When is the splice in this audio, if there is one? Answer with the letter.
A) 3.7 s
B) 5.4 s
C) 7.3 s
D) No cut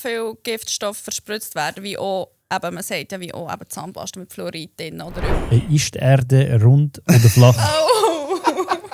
B